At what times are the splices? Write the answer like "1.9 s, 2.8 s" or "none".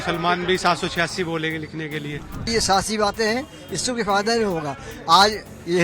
2.5 s